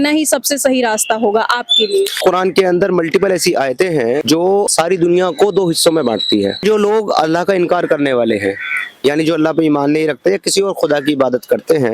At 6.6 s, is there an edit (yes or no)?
yes